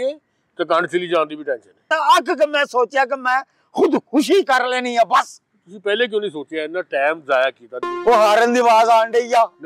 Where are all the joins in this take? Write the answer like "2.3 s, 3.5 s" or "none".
1.9 s, 7.9 s